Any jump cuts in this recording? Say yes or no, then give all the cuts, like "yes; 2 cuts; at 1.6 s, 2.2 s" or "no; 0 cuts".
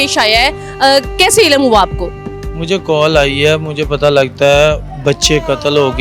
no; 0 cuts